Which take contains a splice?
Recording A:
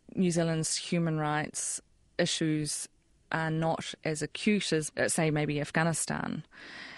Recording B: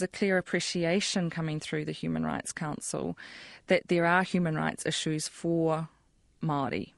A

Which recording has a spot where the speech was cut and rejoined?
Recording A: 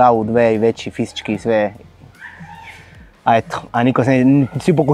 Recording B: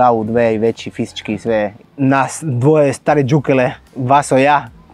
B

